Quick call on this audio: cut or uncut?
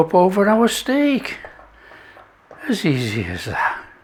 uncut